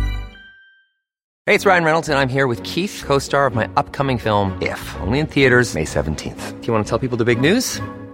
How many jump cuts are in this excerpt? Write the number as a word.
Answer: one